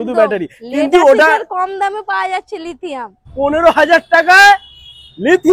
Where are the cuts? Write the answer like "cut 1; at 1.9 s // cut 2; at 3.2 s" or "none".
cut 1; at 3.2 s

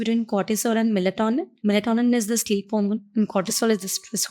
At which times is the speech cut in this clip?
cut 1; at 1.5 s

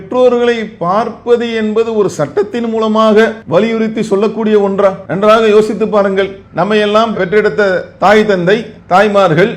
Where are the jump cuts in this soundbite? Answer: cut 1; at 3.4 s // cut 2; at 5.1 s

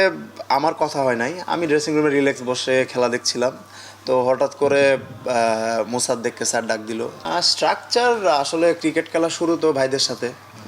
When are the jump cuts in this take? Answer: cut 1; at 7.2 s

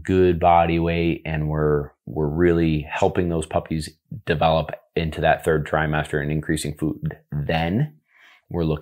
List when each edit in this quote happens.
none

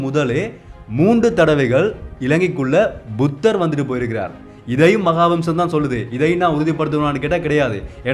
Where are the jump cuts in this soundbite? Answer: none

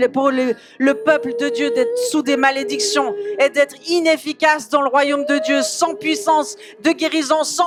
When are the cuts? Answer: none

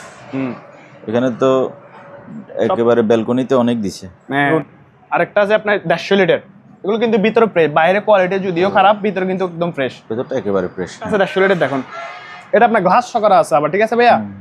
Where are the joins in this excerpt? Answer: cut 1; at 4.5 s // cut 2; at 11.1 s

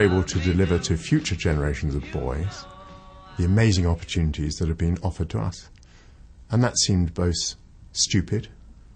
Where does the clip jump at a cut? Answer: none

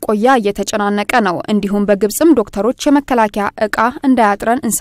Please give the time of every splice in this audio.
none

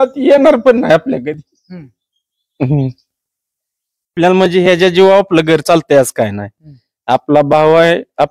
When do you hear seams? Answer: cut 1; at 4.1 s

